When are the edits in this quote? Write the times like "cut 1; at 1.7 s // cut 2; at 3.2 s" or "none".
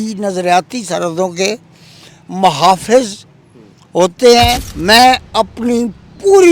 cut 1; at 4.7 s